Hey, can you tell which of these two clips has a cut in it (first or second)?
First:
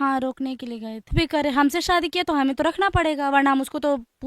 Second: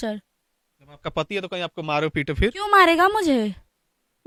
first